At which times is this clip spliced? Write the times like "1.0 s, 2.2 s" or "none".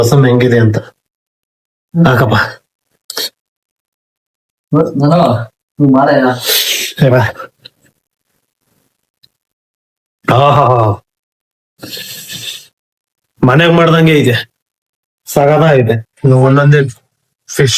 16.1 s